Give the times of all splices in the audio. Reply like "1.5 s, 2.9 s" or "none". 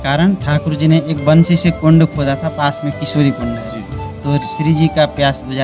none